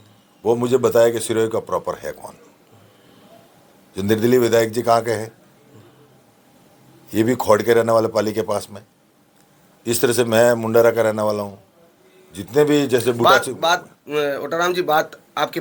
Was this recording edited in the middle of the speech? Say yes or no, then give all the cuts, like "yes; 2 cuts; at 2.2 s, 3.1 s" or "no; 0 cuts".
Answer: no; 0 cuts